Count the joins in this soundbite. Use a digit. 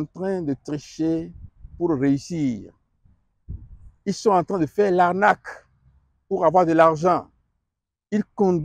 0